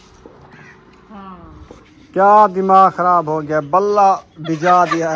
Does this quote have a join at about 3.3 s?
no; 1 cut; at 1.9 s

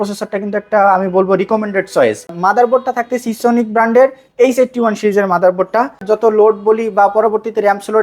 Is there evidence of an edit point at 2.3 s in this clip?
yes; 2 cuts; at 2.3 s, 6.0 s

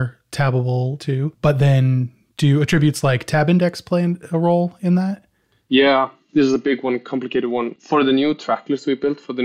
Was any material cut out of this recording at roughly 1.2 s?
yes; 2 cuts; at 1.2 s, 7.7 s

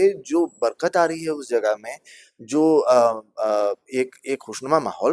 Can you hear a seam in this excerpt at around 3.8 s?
no; 0 cuts

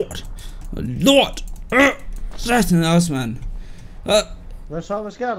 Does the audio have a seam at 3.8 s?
no; 0 cuts

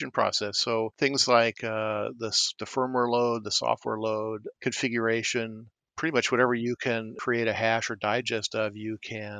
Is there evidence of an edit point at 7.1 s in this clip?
yes; 1 cut; at 7.1 s

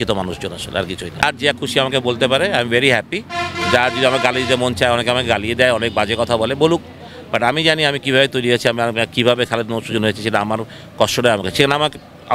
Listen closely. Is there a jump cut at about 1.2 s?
no; 0 cuts

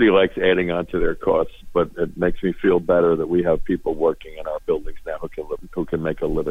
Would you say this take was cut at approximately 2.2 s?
no; 1 cut; at 5.6 s

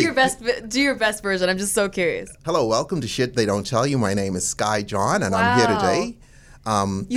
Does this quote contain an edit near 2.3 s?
yes; 1 cut; at 2.3 s

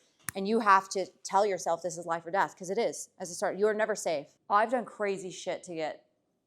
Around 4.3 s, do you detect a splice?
yes; 1 cut; at 4.3 s

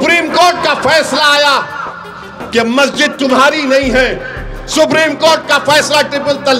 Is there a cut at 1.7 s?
no; 0 cuts

